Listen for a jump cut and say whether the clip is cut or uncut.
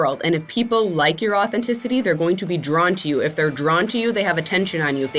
uncut